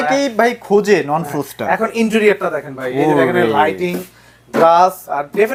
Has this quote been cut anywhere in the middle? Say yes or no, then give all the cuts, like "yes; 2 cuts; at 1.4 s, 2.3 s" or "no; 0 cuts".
no; 0 cuts